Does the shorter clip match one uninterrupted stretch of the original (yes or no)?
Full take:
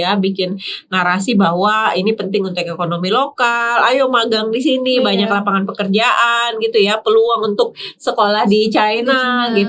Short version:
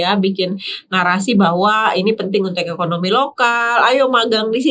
yes